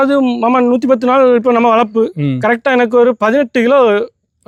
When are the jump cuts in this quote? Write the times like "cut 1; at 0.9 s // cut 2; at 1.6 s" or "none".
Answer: none